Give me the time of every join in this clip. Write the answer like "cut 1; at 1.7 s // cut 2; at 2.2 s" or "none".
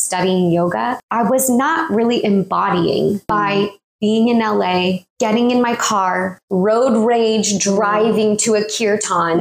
none